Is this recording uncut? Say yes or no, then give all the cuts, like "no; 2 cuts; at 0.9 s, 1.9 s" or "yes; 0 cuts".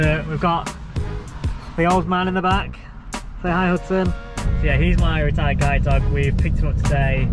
no; 1 cut; at 4.5 s